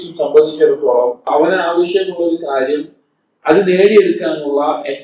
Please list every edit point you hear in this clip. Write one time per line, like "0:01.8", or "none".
0:01.3